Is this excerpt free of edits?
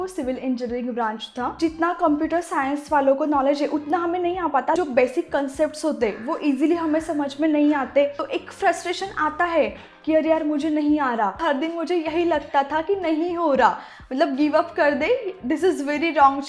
no; 4 cuts; at 1.5 s, 4.8 s, 8.3 s, 11.4 s

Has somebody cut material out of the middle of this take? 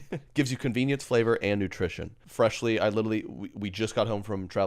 yes; 1 cut; at 2.2 s

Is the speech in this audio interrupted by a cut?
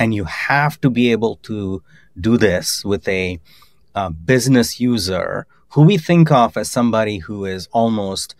no; 0 cuts

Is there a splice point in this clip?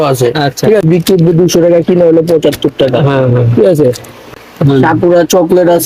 yes; 2 cuts; at 0.8 s, 4.3 s

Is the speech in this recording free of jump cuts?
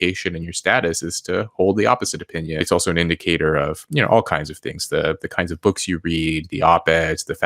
no; 1 cut; at 2.7 s

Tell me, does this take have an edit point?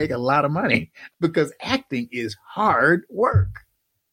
yes; 1 cut; at 1.0 s

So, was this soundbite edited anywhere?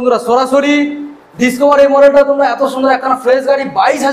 no; 0 cuts

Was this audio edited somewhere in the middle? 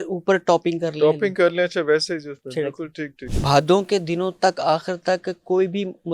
yes; 1 cut; at 3.2 s

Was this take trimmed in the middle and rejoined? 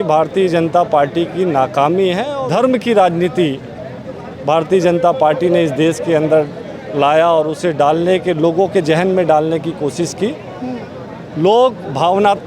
yes; 1 cut; at 2.3 s

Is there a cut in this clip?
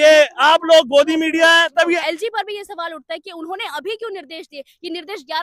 yes; 1 cut; at 2.0 s

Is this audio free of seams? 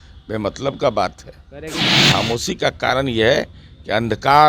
no; 1 cut; at 1.8 s

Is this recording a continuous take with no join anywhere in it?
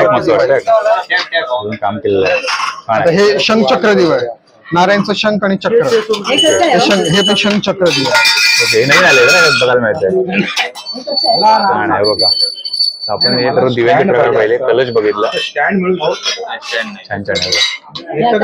yes; 0 cuts

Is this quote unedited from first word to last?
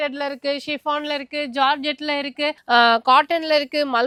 yes; 0 cuts

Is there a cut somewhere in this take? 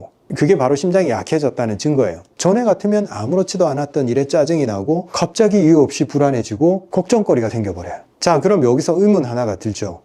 yes; 1 cut; at 2.2 s

